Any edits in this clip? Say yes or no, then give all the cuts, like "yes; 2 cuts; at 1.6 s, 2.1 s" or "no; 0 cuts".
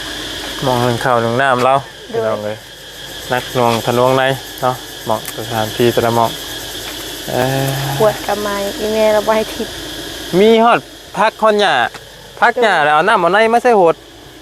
no; 0 cuts